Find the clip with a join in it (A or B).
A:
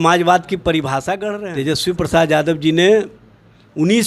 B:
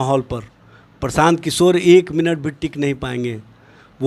A